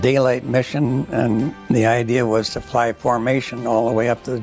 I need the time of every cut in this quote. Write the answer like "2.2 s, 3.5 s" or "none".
1.6 s